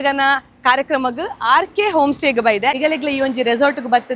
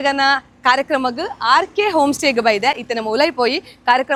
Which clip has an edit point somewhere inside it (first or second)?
first